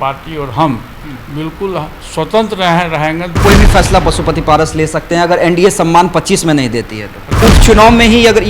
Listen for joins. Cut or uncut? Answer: cut